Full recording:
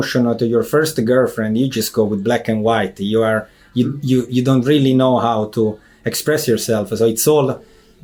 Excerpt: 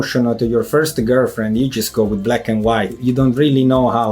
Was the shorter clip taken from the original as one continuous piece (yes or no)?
no